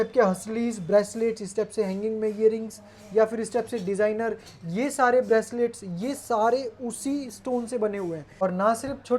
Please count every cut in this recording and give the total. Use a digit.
1